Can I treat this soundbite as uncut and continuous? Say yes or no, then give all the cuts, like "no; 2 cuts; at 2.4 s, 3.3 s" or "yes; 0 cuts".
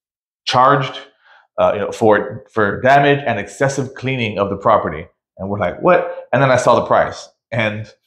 yes; 0 cuts